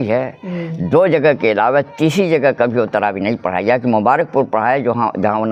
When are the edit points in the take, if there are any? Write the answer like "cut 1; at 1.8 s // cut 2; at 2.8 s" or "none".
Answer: none